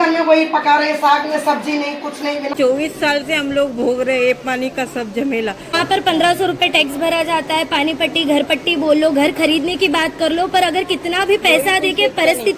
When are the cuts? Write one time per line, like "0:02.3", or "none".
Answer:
0:02.5
0:05.8

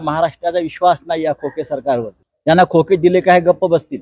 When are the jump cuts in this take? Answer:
0:02.2

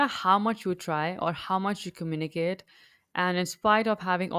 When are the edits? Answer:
none

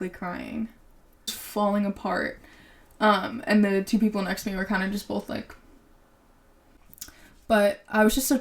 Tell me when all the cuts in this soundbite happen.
0:01.4
0:06.8

